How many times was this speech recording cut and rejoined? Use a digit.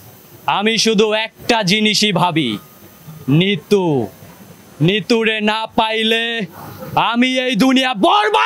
0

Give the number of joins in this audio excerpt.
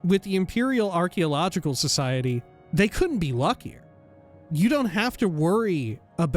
2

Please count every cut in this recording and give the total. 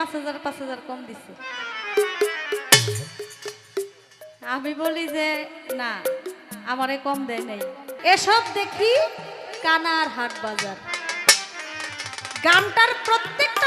1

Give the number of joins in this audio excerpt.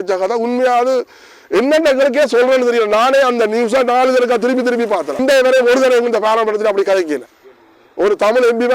1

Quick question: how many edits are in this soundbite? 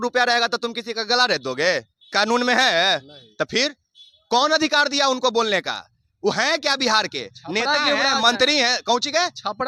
0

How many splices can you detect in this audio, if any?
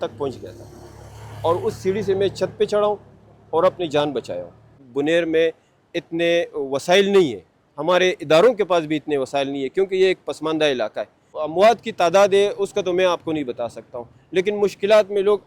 2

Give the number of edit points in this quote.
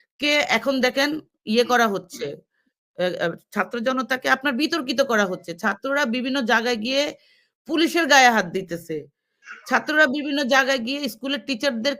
0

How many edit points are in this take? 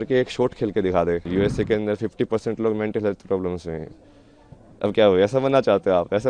1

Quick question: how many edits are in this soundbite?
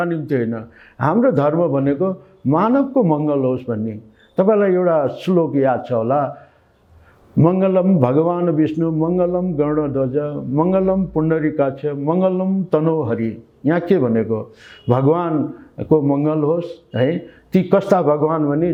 0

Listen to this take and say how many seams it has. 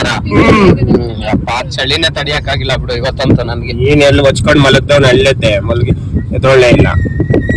1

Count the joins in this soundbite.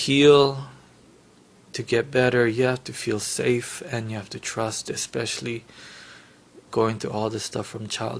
0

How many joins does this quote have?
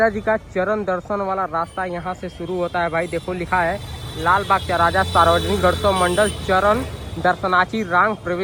0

